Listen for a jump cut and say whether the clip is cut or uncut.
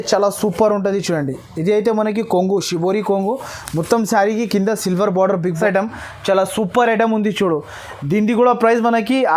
cut